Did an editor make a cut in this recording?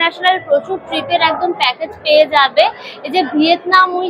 no; 0 cuts

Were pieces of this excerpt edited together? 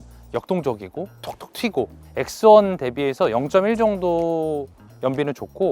yes; 1 cut; at 2.0 s

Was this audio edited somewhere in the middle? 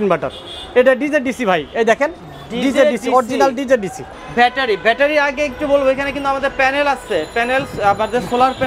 yes; 1 cut; at 4.0 s

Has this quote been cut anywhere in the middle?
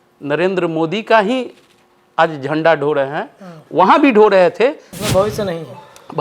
yes; 1 cut; at 4.9 s

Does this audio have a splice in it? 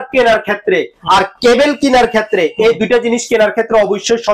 no; 0 cuts

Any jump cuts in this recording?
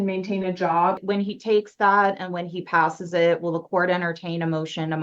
yes; 1 cut; at 1.0 s

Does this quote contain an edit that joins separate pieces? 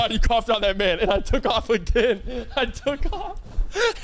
no; 0 cuts

